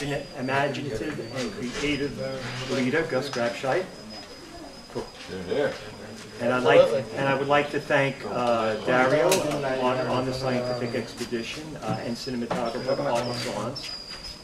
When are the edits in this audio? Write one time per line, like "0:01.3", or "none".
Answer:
0:12.9